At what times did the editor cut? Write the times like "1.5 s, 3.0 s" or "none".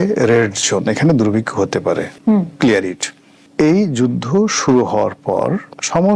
none